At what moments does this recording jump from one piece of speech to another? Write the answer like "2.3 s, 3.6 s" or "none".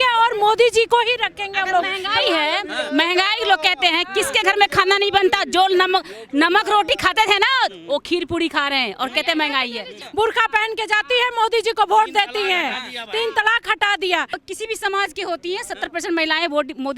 10.0 s, 14.4 s

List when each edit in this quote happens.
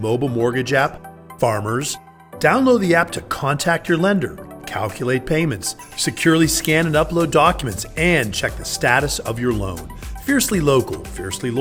none

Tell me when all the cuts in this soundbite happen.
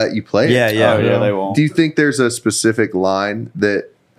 1.5 s

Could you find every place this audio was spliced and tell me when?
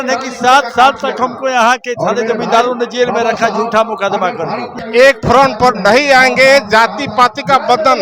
4.7 s

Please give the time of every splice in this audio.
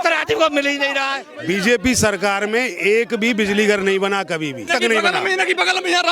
1.3 s, 4.6 s

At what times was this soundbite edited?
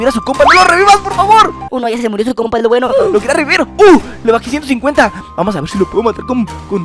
none

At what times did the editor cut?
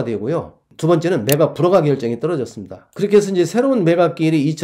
none

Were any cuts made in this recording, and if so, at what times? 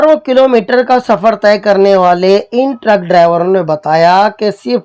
none

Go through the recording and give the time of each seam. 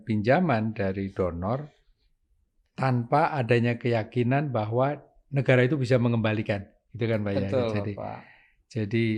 none

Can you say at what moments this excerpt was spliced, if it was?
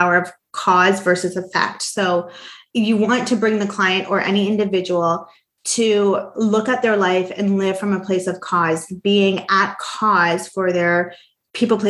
2.6 s

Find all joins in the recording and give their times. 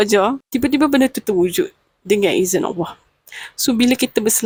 none

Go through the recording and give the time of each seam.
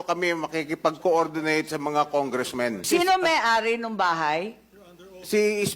2.8 s

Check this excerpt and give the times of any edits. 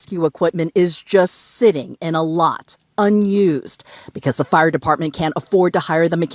none

